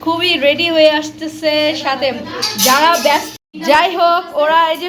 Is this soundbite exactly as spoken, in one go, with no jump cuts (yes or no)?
no